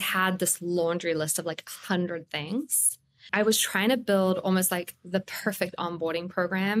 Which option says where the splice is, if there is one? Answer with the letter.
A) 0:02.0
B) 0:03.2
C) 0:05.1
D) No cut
B